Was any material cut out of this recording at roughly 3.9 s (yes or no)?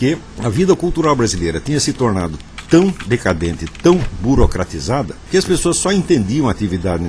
no